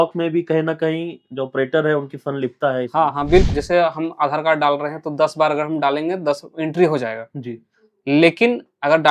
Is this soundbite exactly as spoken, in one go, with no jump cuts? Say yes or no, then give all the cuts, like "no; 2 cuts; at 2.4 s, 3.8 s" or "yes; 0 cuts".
no; 1 cut; at 3.5 s